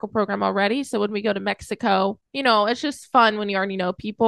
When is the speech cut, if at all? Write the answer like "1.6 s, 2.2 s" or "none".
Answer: 2.3 s